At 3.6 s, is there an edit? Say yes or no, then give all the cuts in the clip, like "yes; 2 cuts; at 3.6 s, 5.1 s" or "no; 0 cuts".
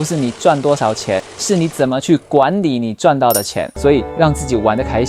yes; 2 cuts; at 1.3 s, 3.6 s